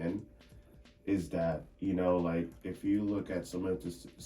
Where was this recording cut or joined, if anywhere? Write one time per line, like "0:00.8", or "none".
0:01.7